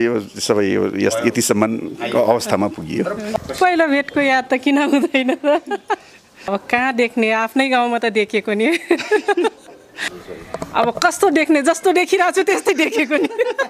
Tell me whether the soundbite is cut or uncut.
cut